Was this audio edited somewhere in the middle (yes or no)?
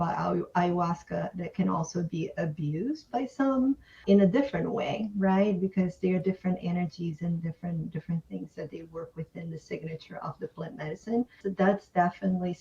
yes